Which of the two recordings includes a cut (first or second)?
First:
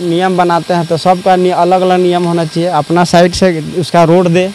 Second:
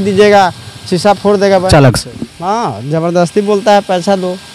second